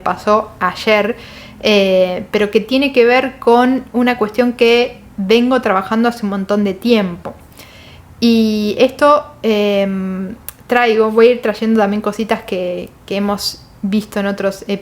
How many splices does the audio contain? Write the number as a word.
zero